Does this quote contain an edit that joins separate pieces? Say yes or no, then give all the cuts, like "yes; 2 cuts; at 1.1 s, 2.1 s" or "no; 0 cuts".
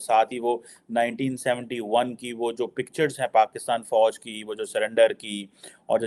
no; 0 cuts